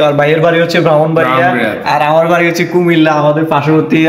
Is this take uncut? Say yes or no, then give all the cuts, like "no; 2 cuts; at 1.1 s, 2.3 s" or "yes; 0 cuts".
yes; 0 cuts